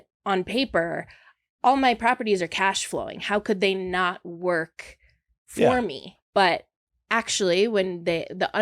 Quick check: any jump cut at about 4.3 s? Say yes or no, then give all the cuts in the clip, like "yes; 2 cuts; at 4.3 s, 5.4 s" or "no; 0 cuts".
no; 1 cut; at 6.1 s